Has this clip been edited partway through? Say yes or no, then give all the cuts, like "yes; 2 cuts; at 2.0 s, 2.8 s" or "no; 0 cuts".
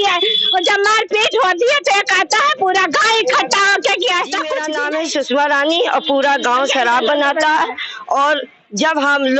yes; 1 cut; at 4.6 s